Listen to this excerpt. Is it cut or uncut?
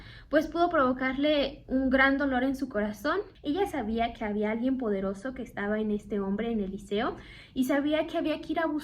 cut